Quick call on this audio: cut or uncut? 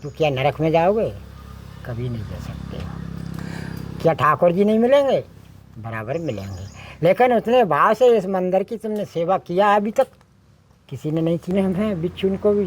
cut